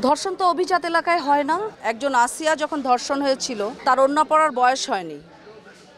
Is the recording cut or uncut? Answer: cut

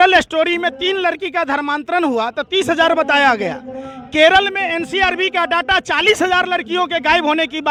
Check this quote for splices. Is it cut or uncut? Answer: uncut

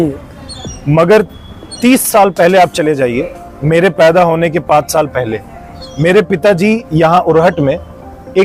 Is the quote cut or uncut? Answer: uncut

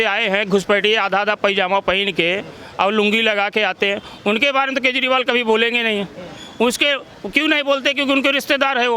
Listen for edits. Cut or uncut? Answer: uncut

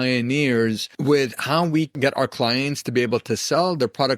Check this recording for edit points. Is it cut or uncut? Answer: cut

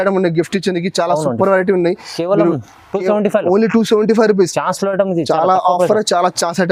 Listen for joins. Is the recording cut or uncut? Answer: uncut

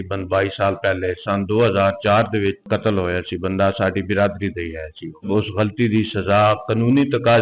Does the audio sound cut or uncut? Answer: cut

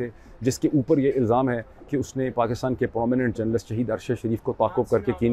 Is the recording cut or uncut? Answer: uncut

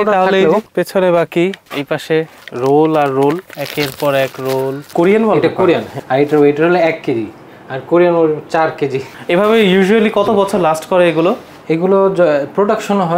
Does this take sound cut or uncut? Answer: cut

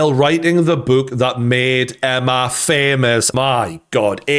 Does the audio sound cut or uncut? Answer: cut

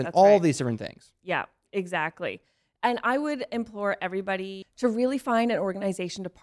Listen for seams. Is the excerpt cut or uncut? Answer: cut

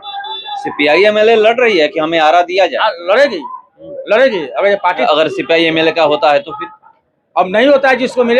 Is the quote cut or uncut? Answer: cut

